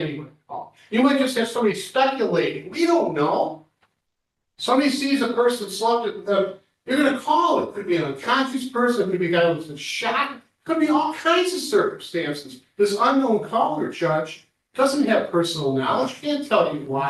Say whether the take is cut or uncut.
uncut